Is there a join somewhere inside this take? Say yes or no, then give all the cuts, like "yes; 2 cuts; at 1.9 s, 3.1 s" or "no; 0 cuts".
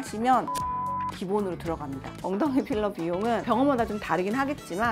yes; 1 cut; at 2.1 s